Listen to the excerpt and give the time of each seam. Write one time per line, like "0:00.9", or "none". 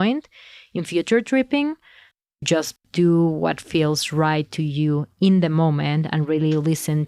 0:02.2